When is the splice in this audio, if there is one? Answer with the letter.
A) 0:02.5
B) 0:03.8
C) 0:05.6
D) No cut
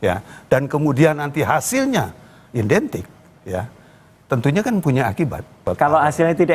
C